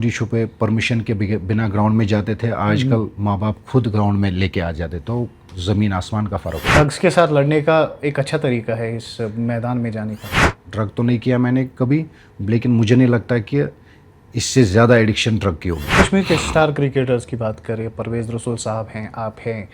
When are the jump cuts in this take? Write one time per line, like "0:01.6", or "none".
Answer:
0:06.8
0:10.5
0:16.0